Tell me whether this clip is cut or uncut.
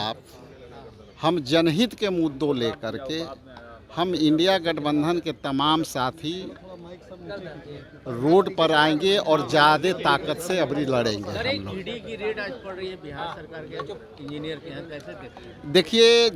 uncut